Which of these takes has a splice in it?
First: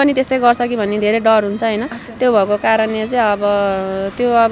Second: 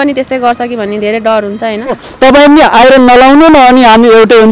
second; 1 cut; at 2.0 s

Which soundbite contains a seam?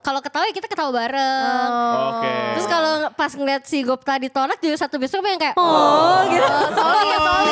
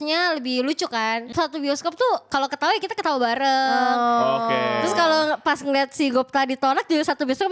second; 1 cut; at 1.3 s

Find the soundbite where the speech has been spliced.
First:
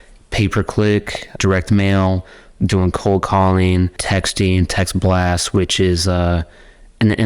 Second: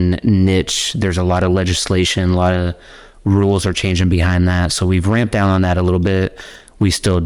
first; 2 cuts; at 1.4 s, 4.0 s

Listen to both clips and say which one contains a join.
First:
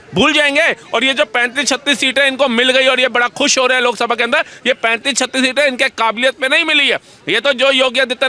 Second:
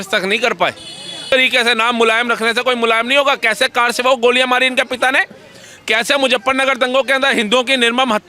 second; 1 cut; at 1.3 s

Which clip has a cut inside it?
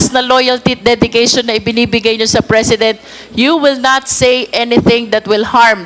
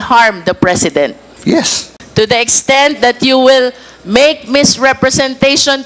second; 1 cut; at 1.6 s

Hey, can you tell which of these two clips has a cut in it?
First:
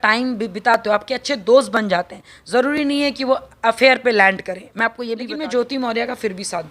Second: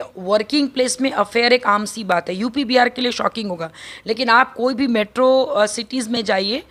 first; 1 cut; at 5.3 s

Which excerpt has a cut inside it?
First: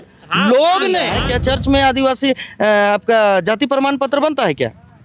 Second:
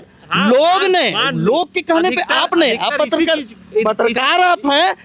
first; 1 cut; at 1.2 s

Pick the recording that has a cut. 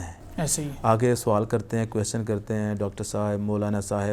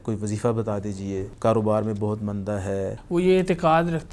second; 2 cuts; at 1.3 s, 3.0 s

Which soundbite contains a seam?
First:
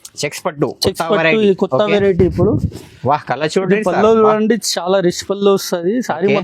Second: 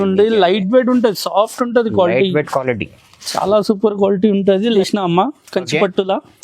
second; 1 cut; at 4.7 s

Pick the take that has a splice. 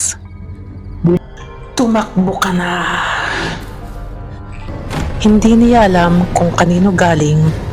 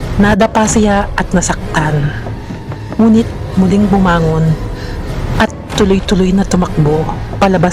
first; 1 cut; at 1.2 s

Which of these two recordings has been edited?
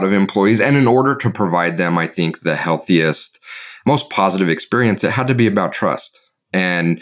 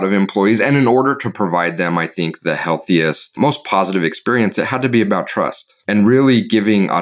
second; 2 cuts; at 3.2 s, 5.7 s

